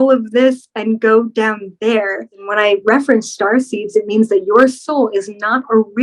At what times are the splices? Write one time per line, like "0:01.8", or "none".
0:02.4